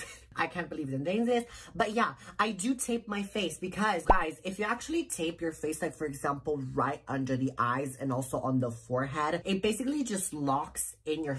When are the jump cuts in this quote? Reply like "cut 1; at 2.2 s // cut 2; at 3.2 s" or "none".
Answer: none